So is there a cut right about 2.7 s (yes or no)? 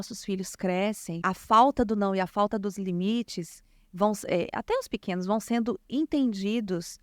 no